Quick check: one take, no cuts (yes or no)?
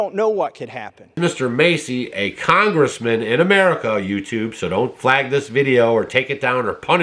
no